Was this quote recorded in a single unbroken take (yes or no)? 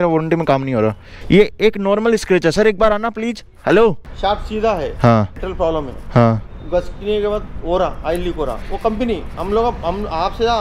no